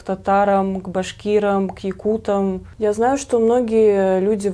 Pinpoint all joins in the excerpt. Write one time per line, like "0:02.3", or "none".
0:02.7

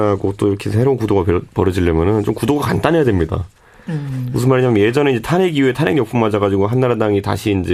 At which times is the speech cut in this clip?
0:05.9

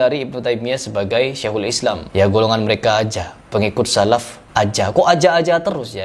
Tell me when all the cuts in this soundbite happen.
none

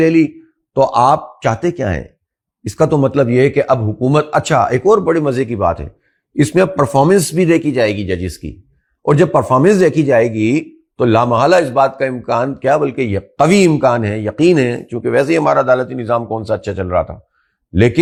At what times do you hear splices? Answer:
none

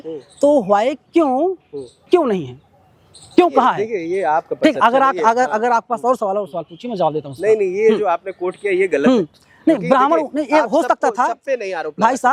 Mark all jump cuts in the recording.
none

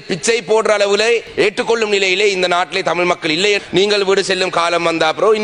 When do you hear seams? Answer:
0:01.3
0:03.6

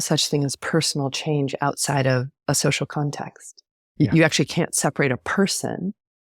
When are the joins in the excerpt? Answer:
0:02.3

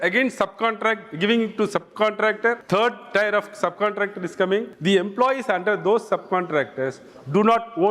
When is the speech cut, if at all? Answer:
0:02.6
0:04.7

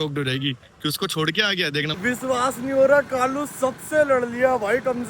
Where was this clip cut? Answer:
0:02.0

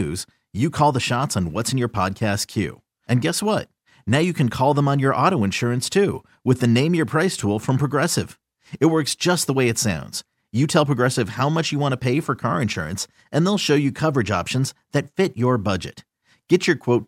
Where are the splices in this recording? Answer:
none

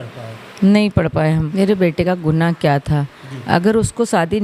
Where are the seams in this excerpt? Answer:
0:01.5

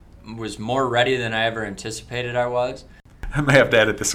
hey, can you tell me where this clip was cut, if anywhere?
0:03.0

